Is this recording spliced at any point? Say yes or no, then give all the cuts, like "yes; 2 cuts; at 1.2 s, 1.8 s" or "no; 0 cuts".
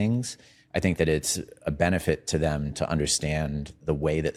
no; 0 cuts